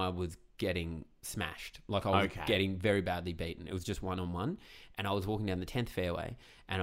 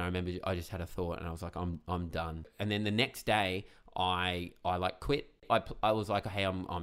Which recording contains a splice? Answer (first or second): second